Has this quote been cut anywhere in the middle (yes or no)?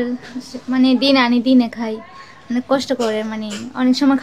no